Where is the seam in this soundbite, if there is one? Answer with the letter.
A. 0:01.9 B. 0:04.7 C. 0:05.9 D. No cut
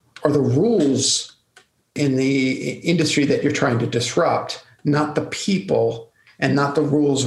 A